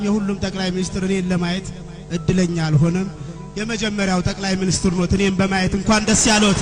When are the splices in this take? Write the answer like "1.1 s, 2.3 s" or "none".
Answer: none